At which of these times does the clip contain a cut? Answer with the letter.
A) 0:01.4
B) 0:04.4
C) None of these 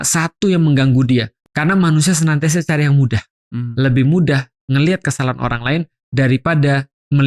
A